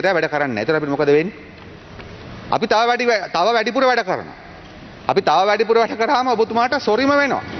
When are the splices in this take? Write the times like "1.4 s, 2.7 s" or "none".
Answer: none